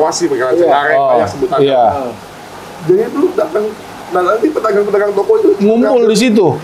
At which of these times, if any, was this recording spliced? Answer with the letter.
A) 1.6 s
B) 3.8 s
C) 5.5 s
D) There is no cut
D